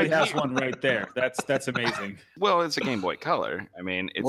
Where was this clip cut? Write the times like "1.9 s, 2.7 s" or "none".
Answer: 2.3 s